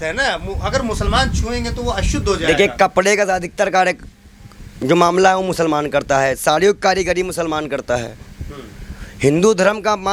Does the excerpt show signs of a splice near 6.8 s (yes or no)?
no